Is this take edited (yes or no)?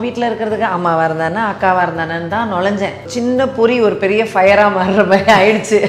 yes